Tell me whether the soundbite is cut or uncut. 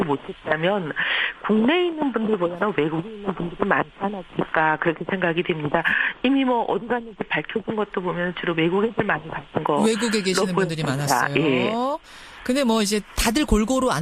uncut